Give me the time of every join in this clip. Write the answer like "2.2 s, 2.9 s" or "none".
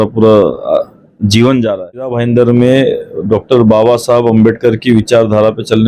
2.2 s